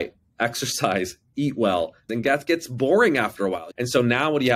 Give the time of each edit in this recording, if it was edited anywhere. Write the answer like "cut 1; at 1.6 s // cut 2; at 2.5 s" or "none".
cut 1; at 2.1 s // cut 2; at 3.7 s